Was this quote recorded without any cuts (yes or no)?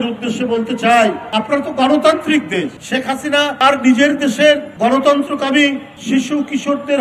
no